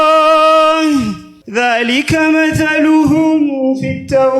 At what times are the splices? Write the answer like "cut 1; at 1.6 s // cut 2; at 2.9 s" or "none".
cut 1; at 1.0 s